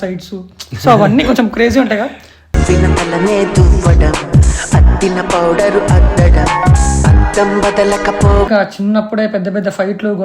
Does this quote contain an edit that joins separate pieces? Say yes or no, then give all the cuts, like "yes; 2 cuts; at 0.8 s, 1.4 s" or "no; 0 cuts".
yes; 1 cut; at 8.5 s